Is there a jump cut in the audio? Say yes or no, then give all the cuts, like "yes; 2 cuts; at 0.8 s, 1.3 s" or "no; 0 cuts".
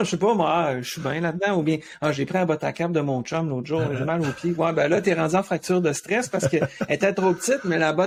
no; 0 cuts